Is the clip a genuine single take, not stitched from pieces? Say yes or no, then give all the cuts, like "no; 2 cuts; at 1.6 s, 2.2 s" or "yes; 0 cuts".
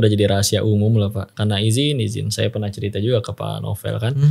no; 1 cut; at 1.3 s